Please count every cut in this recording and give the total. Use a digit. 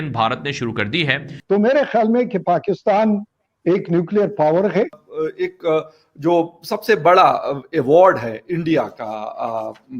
2